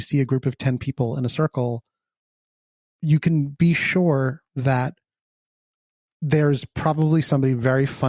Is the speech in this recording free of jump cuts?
no; 1 cut; at 2.9 s

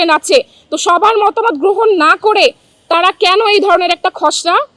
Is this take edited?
no; 0 cuts

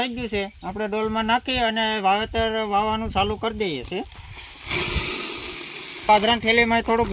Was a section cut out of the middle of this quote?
yes; 1 cut; at 6.1 s

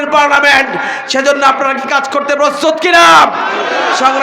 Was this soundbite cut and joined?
no; 0 cuts

